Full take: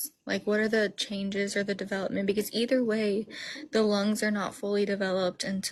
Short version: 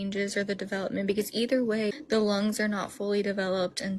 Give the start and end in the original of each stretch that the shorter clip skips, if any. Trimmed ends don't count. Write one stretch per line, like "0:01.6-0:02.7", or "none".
0:03.1-0:03.5